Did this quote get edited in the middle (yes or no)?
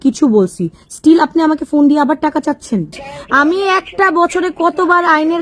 yes